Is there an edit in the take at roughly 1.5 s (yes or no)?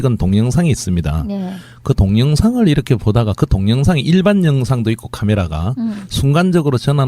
yes